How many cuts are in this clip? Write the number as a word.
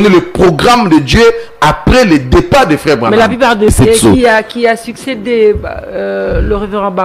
one